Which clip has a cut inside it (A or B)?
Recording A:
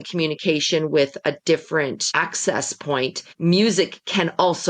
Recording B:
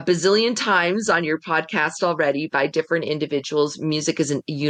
A